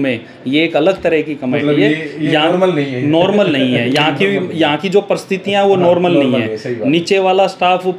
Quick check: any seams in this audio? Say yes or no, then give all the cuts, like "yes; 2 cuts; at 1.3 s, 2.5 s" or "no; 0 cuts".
no; 0 cuts